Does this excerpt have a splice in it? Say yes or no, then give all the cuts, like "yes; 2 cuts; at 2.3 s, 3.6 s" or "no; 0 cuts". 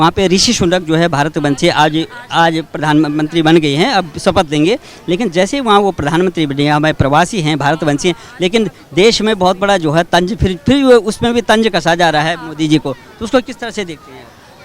no; 0 cuts